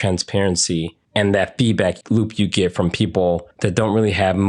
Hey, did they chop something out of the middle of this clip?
yes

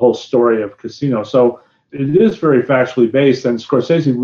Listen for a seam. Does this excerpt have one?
yes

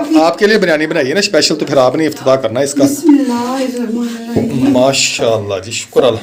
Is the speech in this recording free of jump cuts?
yes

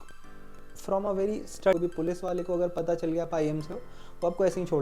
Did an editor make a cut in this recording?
yes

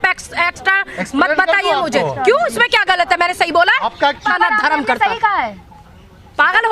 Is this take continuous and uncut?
no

